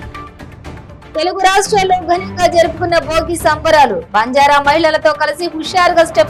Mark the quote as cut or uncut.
uncut